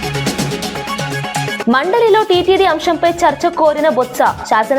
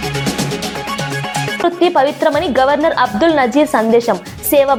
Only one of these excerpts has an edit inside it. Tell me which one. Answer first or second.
first